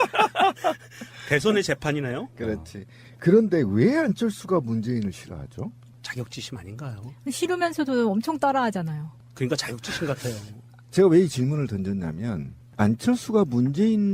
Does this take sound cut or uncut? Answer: cut